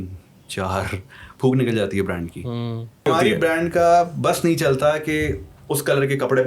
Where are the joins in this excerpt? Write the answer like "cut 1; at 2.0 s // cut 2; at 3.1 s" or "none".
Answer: cut 1; at 3.0 s